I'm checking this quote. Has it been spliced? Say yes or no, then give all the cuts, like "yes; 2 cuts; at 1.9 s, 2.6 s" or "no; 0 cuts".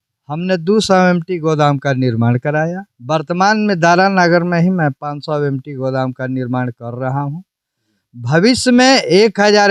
no; 0 cuts